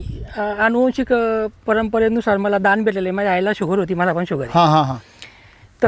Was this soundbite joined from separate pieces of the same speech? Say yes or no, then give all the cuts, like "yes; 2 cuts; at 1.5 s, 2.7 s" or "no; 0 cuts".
no; 0 cuts